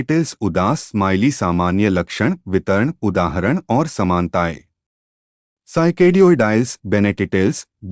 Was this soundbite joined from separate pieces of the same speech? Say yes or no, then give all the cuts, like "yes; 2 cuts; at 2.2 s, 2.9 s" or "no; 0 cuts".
yes; 1 cut; at 2.1 s